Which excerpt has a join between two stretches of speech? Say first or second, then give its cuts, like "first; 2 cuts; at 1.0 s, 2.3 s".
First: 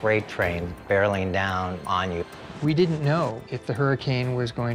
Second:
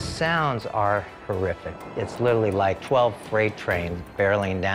first; 2 cuts; at 2.4 s, 3.4 s